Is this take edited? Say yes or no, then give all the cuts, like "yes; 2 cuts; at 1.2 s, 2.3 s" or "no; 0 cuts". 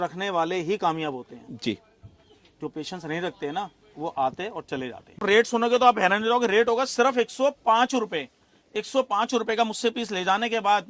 yes; 1 cut; at 5.2 s